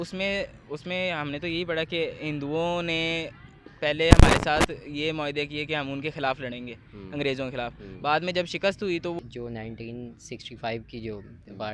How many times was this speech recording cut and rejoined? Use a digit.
1